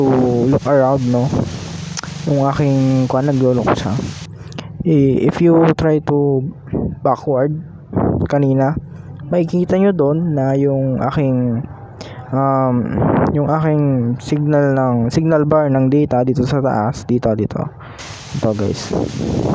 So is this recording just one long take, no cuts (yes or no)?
yes